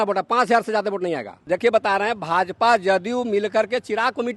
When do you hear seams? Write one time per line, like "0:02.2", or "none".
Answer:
0:01.3